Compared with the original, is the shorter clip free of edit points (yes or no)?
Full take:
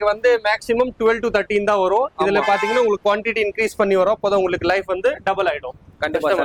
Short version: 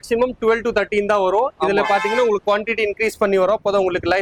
yes